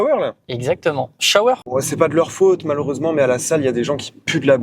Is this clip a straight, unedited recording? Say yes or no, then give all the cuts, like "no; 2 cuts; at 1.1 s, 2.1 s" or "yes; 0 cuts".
no; 1 cut; at 1.6 s